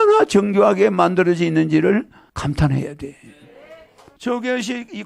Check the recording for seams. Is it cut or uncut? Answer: cut